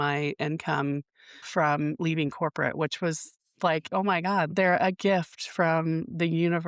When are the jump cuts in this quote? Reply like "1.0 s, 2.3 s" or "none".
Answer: 4.5 s